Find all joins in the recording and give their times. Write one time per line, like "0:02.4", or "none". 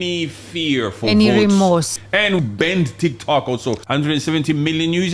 0:02.3
0:03.8